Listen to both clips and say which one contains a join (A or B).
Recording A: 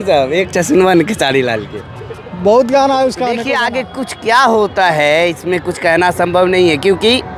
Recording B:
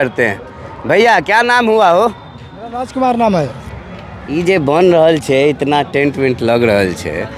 A